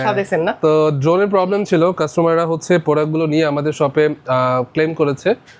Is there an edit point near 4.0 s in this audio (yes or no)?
no